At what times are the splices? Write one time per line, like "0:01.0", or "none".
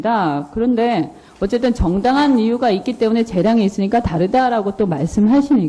0:01.2